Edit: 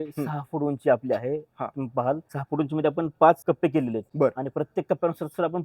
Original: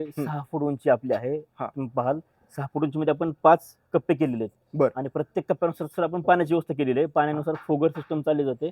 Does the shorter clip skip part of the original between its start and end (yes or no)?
yes